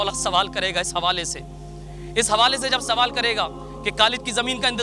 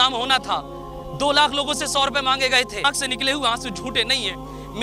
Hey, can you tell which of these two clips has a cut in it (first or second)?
second